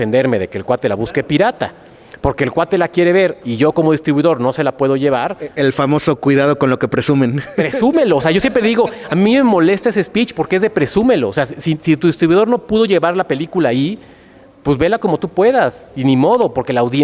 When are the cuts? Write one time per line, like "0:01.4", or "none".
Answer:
none